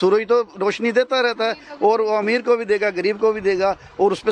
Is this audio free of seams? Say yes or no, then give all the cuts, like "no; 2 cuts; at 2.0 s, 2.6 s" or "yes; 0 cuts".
yes; 0 cuts